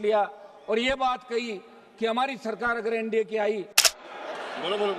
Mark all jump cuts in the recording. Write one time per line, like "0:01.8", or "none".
0:03.9